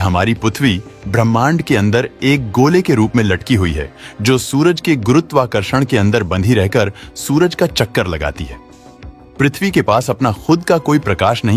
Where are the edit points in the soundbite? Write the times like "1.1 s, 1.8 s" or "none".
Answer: none